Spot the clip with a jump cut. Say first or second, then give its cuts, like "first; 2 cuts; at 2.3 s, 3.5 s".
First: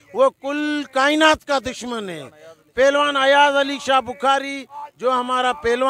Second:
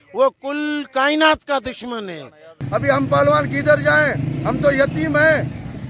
second; 1 cut; at 2.5 s